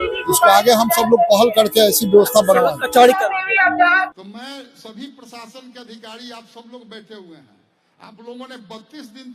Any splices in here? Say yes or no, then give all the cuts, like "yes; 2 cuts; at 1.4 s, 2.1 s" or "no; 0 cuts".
yes; 1 cut; at 3.9 s